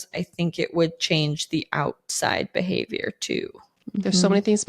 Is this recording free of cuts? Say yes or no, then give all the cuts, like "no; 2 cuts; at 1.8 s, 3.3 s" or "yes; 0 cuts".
no; 1 cut; at 3.8 s